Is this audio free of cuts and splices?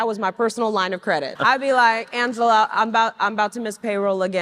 no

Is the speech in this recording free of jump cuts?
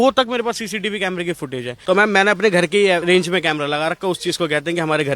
no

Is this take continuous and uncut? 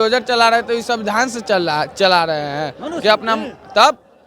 yes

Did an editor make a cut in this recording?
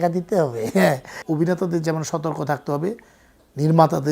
yes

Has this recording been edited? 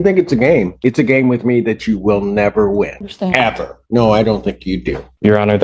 no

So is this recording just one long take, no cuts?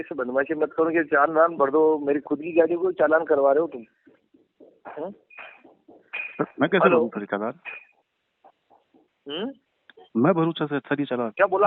yes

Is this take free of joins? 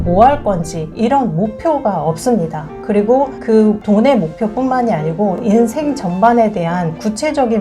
yes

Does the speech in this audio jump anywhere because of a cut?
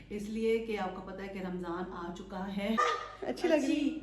yes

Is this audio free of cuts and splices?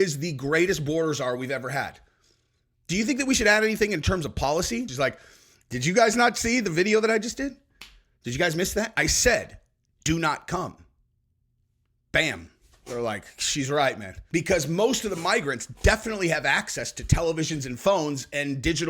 no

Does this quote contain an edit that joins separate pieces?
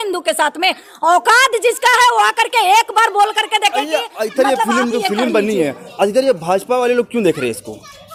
no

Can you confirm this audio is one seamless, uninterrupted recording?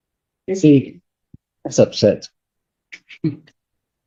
yes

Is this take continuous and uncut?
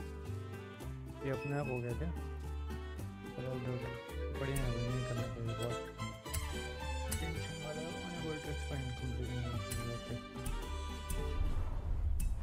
yes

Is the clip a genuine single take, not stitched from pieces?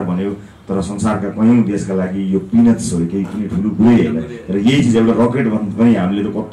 yes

